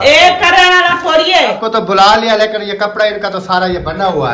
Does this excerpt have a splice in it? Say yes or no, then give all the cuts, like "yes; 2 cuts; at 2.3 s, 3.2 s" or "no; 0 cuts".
yes; 1 cut; at 1.6 s